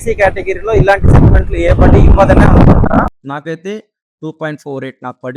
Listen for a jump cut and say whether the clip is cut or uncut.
cut